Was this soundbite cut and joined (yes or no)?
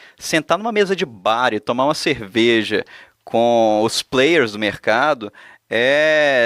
no